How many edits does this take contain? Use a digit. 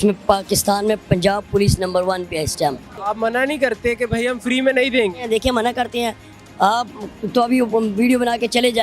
1